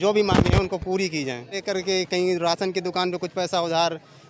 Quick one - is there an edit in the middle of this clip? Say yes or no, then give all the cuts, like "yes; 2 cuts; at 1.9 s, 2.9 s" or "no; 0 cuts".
yes; 1 cut; at 1.6 s